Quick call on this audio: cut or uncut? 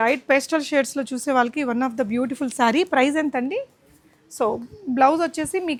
uncut